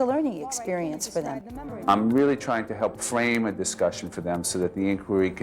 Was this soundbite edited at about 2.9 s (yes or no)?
no